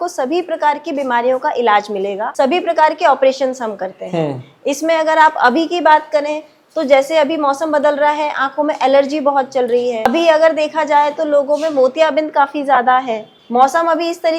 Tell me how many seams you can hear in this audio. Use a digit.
0